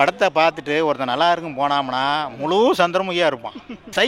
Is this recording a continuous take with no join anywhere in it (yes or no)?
yes